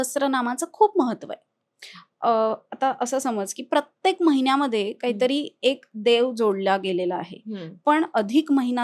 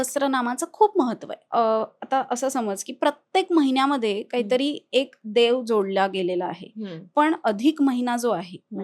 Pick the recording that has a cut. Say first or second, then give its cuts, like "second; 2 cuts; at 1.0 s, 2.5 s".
second; 1 cut; at 1.3 s